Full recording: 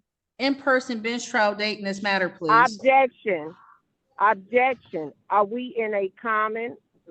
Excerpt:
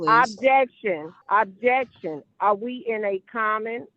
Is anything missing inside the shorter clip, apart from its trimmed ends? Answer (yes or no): yes